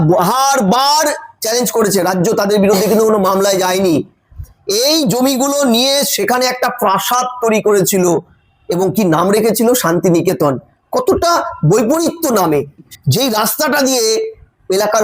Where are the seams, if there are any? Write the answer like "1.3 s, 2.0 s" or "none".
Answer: 12.9 s